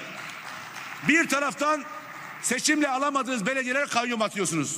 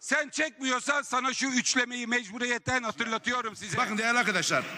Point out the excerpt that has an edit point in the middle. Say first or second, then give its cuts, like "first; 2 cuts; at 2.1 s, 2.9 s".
second; 1 cut; at 3.6 s